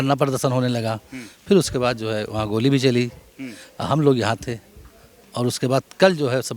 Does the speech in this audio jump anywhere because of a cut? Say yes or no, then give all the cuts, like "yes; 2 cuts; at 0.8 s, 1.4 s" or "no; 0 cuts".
no; 0 cuts